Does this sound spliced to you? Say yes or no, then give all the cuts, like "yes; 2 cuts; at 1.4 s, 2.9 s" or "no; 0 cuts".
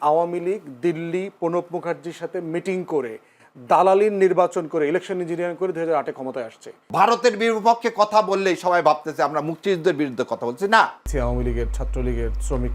yes; 2 cuts; at 6.8 s, 11.0 s